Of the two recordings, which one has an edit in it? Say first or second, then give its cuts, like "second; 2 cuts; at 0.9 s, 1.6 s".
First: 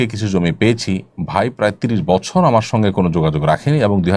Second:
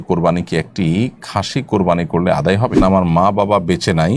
second; 1 cut; at 2.7 s